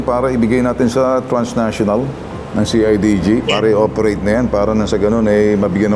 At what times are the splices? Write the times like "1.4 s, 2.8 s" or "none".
none